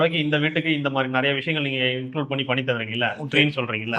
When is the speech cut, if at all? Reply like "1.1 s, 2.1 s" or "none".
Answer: none